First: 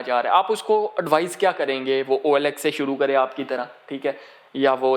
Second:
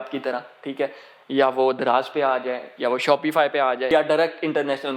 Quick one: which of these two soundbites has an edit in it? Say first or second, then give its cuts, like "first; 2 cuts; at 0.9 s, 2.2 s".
second; 1 cut; at 3.9 s